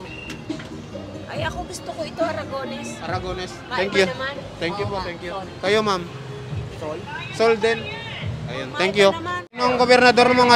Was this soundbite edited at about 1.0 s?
no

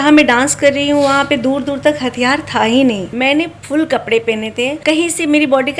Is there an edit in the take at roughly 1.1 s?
no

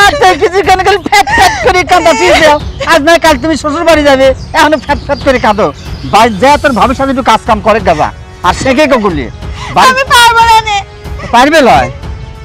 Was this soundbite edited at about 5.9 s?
no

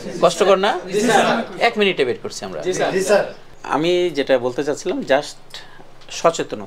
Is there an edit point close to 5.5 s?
no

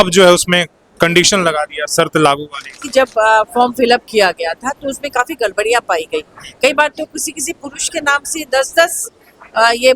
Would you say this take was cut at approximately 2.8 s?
yes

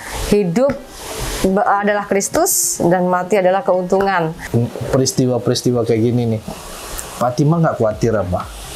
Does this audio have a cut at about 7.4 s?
no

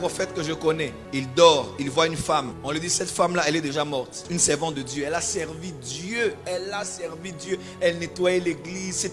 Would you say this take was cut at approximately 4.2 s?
yes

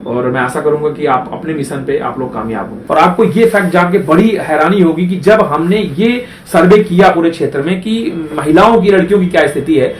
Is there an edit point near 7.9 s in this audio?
no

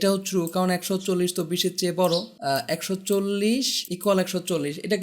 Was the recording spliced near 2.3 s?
yes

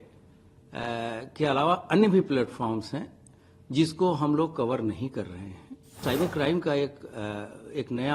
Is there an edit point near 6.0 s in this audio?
yes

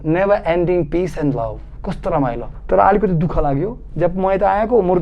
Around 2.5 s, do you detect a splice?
yes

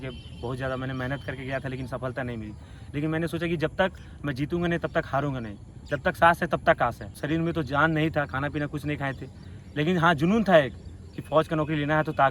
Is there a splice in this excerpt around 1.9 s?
no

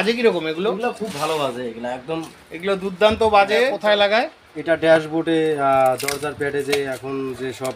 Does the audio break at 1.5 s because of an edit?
no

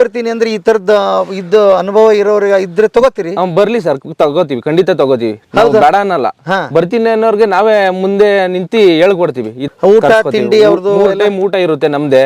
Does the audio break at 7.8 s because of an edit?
no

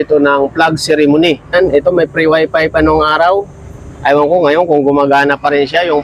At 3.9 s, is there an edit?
no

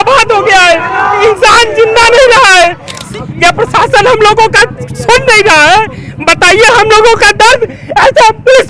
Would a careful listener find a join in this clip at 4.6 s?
no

